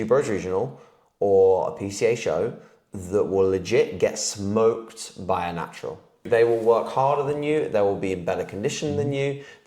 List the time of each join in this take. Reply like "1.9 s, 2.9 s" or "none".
6.2 s